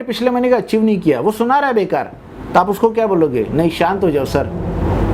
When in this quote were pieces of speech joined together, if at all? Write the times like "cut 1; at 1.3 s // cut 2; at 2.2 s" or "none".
none